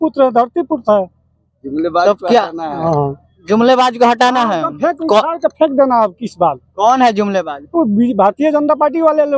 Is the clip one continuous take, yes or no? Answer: yes